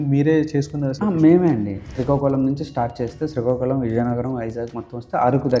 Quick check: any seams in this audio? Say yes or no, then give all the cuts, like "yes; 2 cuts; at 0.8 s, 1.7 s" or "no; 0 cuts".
yes; 2 cuts; at 0.9 s, 1.9 s